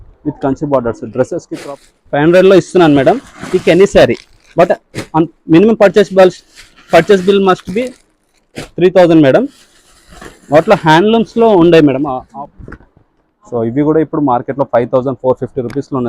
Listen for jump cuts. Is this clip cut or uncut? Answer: cut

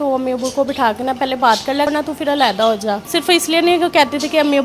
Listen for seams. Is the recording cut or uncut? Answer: cut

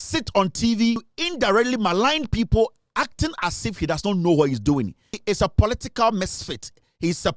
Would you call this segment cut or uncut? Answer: cut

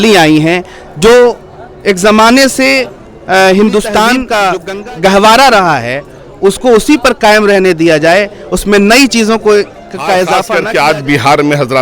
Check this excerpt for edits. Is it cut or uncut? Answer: cut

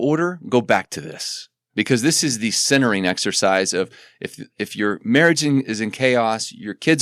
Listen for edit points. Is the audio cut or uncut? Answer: uncut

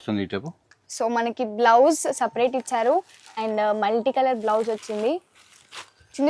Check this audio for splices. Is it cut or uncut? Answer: uncut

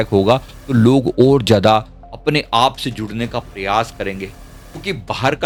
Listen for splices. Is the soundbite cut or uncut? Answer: uncut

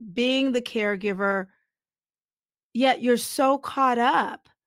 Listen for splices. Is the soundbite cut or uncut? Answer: uncut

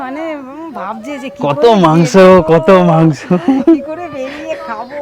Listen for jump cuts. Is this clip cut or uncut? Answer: uncut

